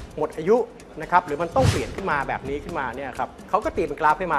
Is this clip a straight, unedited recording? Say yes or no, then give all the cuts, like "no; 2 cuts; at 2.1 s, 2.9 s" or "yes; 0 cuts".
no; 1 cut; at 3.4 s